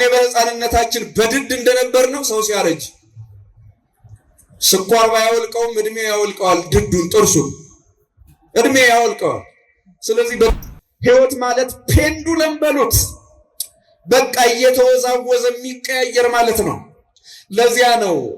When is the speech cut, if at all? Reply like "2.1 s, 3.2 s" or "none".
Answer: 10.5 s